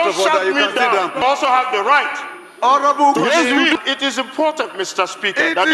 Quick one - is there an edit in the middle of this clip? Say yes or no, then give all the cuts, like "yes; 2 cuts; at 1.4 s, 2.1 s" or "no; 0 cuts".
yes; 2 cuts; at 1.4 s, 3.8 s